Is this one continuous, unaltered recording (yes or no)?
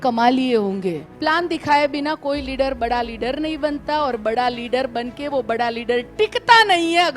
no